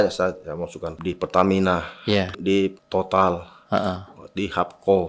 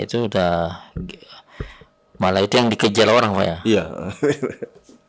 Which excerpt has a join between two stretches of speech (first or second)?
first